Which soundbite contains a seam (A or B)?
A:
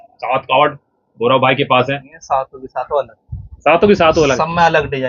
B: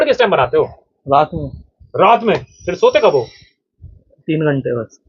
A